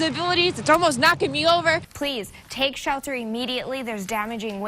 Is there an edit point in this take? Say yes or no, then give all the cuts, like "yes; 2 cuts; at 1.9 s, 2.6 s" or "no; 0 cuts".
yes; 1 cut; at 1.9 s